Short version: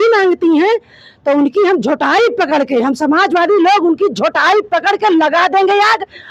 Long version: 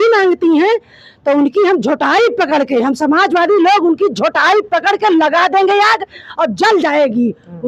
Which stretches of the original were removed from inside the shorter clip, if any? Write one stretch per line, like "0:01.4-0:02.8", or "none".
none